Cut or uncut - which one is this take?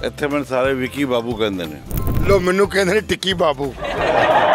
cut